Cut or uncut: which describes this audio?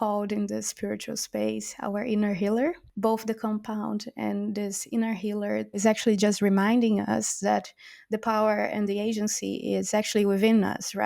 cut